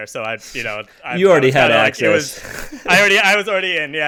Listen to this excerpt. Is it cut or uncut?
uncut